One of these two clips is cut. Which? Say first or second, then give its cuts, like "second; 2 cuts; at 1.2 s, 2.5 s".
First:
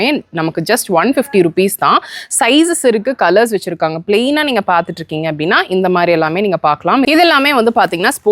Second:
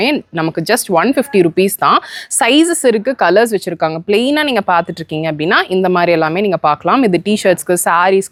first; 1 cut; at 7.0 s